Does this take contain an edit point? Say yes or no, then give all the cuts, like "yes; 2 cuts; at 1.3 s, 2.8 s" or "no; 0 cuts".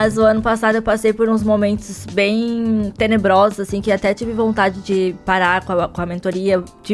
no; 0 cuts